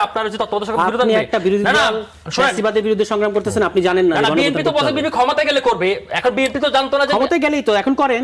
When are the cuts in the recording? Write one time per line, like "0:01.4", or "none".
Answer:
none